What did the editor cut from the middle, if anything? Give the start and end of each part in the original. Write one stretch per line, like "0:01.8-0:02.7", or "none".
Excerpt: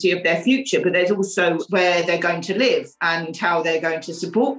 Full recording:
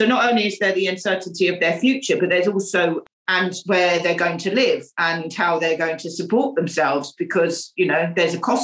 0:03.0-0:03.6

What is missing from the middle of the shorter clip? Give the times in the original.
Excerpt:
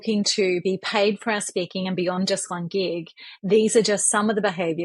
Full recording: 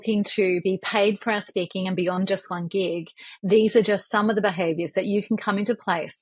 none

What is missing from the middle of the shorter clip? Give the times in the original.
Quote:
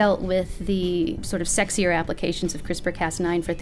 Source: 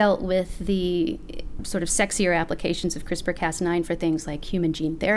0:01.2-0:01.6

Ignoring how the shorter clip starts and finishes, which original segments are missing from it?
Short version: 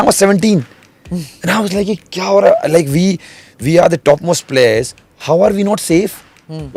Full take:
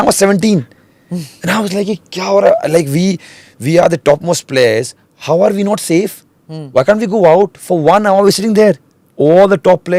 none

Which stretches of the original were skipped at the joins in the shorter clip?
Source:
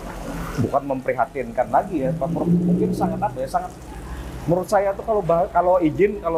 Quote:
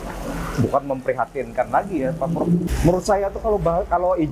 0:02.6-0:04.3

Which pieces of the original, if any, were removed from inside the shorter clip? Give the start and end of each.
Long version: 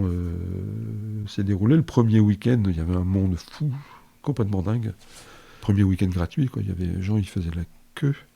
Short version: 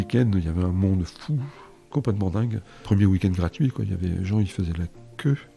0:05.0-0:05.5

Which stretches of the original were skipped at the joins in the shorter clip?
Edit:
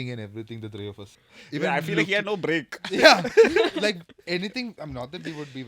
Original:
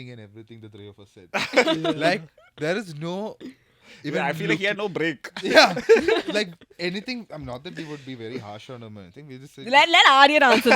0:01.1-0:03.6

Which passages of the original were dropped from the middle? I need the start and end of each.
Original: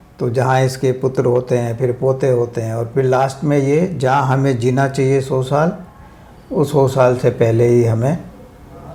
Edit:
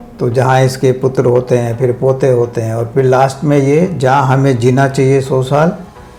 none

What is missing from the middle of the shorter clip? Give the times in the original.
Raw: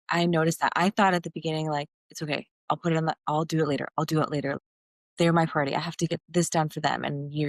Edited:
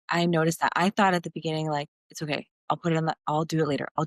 none

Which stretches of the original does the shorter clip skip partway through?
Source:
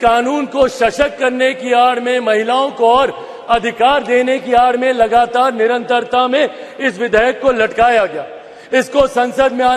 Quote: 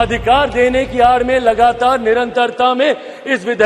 none

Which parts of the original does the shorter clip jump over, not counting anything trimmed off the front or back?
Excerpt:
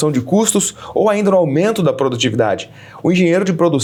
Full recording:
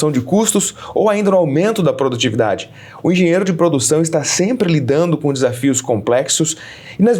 none

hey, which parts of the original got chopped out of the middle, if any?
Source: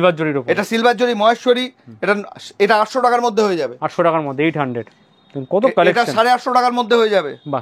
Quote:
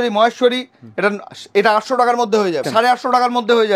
0:03.7-0:06.1

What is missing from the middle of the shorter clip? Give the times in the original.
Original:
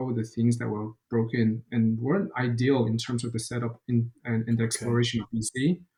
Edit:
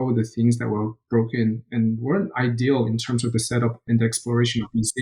0:03.9-0:04.4

